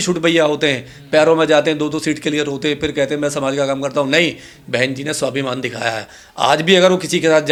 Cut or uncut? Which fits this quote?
uncut